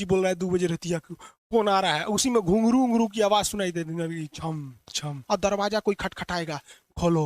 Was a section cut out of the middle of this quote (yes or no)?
yes